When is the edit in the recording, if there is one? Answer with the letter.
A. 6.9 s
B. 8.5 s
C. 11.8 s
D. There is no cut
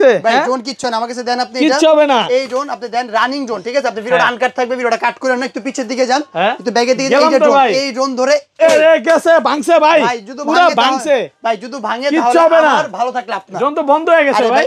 D